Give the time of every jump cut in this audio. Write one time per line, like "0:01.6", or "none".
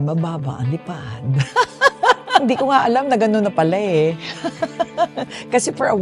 0:02.4